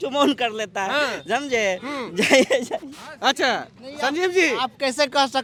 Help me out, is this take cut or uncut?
uncut